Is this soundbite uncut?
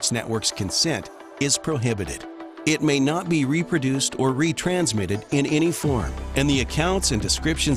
yes; 0 cuts

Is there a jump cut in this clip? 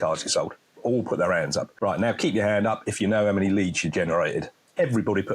yes; 1 cut; at 1.7 s

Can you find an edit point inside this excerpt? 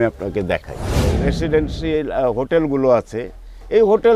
yes; 1 cut; at 1.0 s

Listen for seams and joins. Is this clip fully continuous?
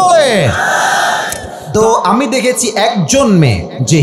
no; 1 cut; at 1.5 s

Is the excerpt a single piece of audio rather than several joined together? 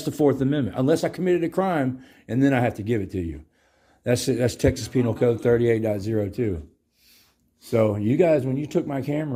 yes; 0 cuts

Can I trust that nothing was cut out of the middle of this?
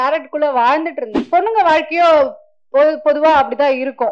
no; 1 cut; at 1.1 s

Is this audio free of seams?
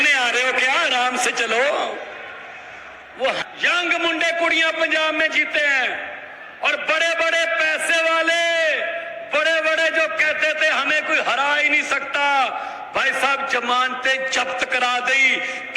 no; 1 cut; at 3.4 s

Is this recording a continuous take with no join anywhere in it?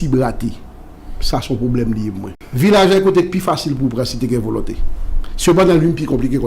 no; 1 cut; at 2.4 s

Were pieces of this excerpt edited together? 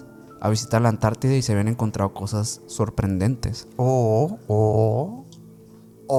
no; 0 cuts

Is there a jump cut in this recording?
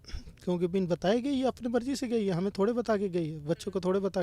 no; 0 cuts

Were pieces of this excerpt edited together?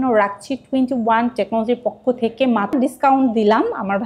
yes; 1 cut; at 2.7 s

